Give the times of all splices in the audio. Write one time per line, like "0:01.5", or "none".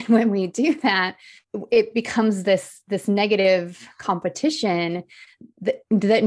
none